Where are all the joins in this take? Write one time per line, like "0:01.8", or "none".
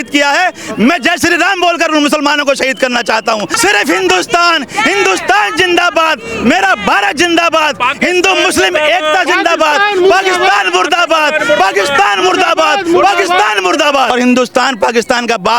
0:03.5
0:14.1